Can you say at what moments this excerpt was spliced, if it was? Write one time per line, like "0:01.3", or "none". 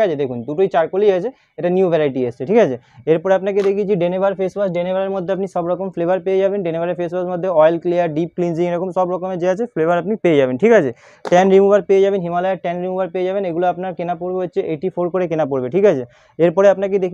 none